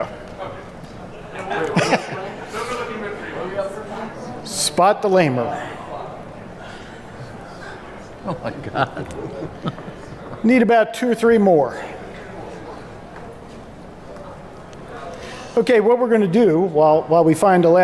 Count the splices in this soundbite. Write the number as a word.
one